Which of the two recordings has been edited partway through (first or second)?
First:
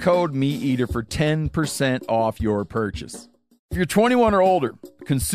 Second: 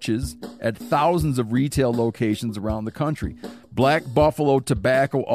first